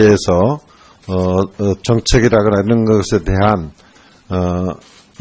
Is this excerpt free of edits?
no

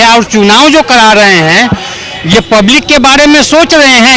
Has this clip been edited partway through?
no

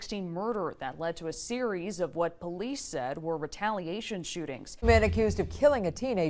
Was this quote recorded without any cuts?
no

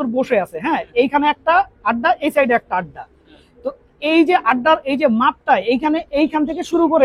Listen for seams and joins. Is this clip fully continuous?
yes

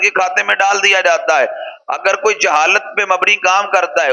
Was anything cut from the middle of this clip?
no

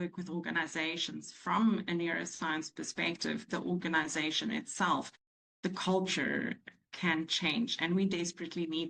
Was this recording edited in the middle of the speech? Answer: no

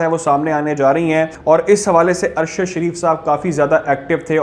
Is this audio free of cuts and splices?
no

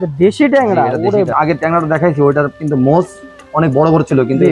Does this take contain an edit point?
yes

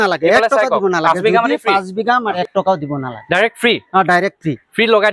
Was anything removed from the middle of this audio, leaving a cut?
yes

